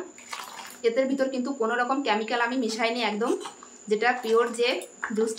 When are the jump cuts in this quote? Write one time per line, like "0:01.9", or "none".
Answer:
none